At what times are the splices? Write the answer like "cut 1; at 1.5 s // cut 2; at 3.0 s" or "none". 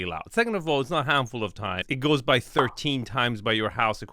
cut 1; at 1.9 s

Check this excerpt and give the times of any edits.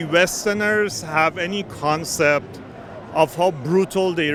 none

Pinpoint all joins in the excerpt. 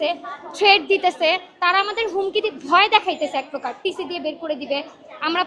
none

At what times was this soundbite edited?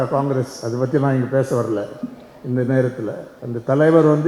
cut 1; at 3.3 s

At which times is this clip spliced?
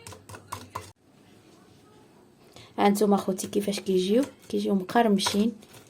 cut 1; at 1.0 s

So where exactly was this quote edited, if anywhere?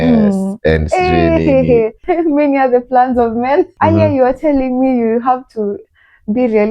cut 1; at 2.0 s // cut 2; at 3.7 s

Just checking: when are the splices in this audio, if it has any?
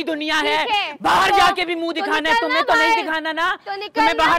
none

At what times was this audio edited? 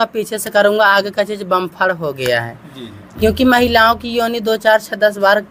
none

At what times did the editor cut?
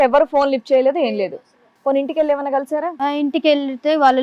none

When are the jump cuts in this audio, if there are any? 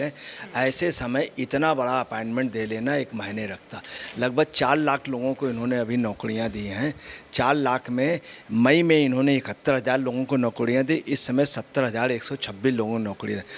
none

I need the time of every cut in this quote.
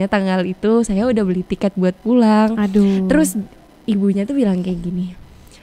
none

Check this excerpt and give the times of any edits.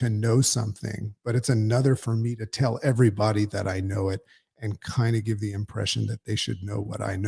none

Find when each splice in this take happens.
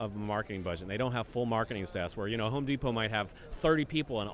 none

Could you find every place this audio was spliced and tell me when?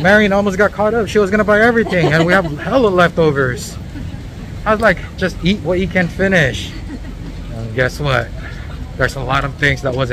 none

